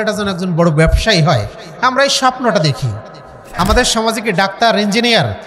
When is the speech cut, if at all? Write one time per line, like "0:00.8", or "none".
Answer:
0:03.4